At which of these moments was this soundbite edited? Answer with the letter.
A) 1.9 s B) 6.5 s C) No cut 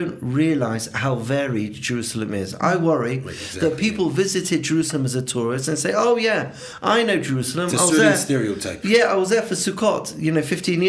C